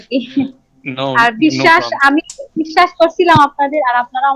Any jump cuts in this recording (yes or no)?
no